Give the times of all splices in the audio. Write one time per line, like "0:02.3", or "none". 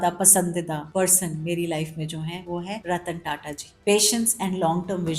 none